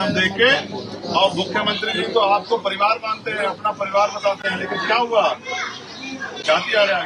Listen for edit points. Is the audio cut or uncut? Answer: uncut